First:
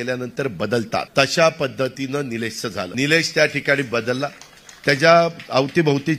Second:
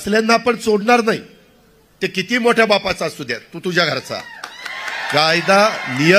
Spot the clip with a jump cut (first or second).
first